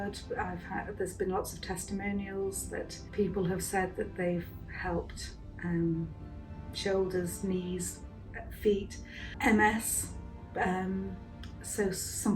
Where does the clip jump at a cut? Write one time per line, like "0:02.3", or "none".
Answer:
0:03.0
0:09.4